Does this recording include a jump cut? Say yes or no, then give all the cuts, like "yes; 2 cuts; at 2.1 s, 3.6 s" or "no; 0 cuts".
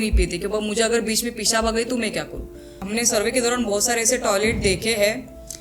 yes; 1 cut; at 2.7 s